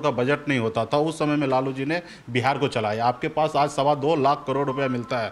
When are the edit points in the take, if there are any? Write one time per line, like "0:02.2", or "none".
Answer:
none